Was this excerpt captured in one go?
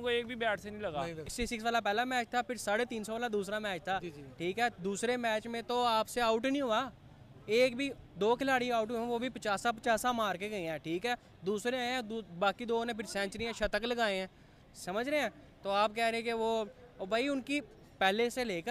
yes; 0 cuts

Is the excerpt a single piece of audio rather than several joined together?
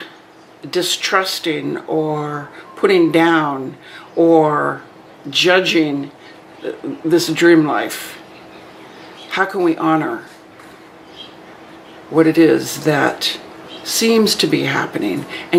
yes; 0 cuts

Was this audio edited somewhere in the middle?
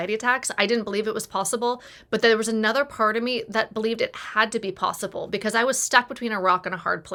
no; 0 cuts

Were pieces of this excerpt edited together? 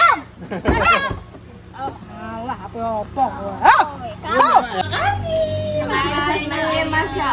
yes; 1 cut; at 4.8 s

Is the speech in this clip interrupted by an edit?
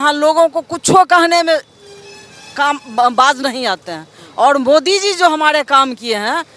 no; 0 cuts

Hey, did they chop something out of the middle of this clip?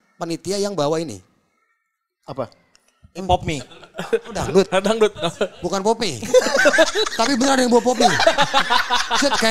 no; 0 cuts

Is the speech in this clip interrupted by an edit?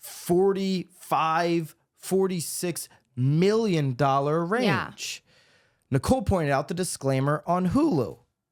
no; 0 cuts

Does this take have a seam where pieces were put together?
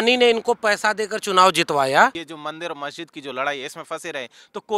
yes; 1 cut; at 2.3 s

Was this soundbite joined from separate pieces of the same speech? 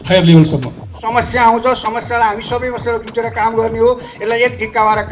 yes; 1 cut; at 0.9 s

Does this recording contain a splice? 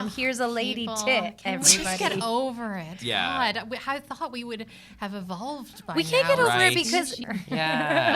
yes; 1 cut; at 7.1 s

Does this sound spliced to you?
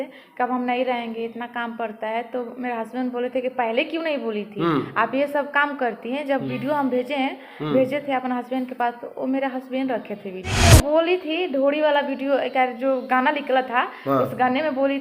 yes; 1 cut; at 10.6 s

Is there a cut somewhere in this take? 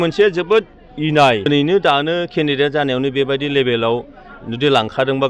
yes; 1 cut; at 1.5 s

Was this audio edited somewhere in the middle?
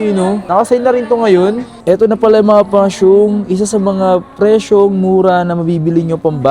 yes; 1 cut; at 1.7 s

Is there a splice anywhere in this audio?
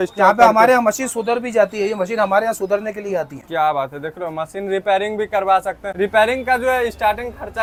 no; 0 cuts

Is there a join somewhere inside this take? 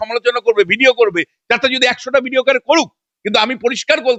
no; 0 cuts

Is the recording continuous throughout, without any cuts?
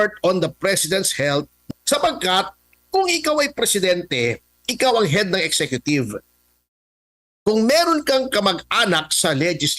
no; 1 cut; at 1.7 s

